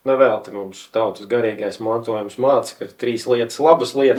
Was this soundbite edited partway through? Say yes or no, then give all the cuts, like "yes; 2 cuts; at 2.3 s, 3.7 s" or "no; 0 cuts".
no; 0 cuts